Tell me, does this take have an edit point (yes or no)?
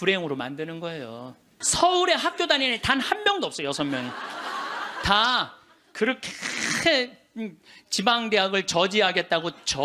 yes